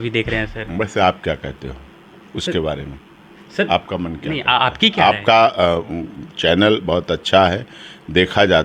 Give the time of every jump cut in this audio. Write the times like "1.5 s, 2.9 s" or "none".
none